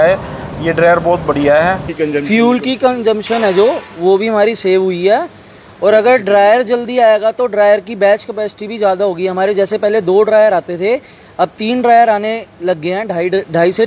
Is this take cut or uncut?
cut